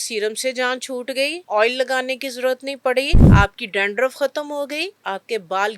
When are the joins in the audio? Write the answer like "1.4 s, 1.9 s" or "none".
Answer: 1.4 s, 3.2 s, 4.9 s